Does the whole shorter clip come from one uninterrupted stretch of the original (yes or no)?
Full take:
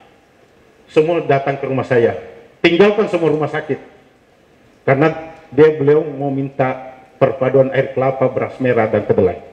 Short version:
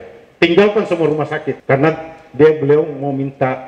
no